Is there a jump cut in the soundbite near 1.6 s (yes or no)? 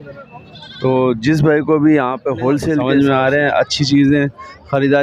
no